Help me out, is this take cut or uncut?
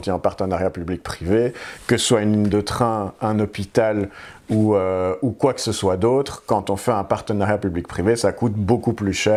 uncut